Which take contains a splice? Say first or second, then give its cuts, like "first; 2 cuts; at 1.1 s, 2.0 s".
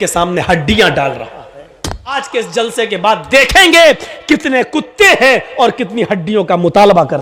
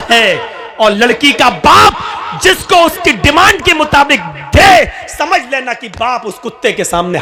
first; 1 cut; at 2.1 s